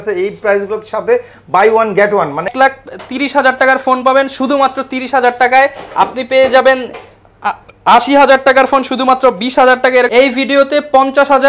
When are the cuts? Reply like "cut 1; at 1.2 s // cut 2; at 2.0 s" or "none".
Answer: cut 1; at 2.5 s // cut 2; at 10.1 s